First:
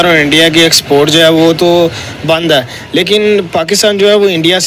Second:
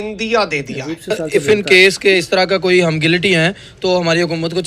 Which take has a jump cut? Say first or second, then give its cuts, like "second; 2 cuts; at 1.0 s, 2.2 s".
second; 1 cut; at 1.2 s